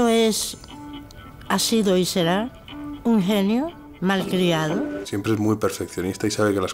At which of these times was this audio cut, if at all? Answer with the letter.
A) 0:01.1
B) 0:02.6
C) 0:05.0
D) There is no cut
C